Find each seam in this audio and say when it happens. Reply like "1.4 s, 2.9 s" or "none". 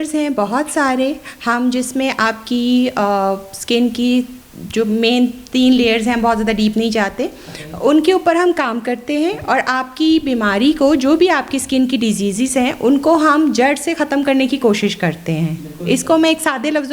none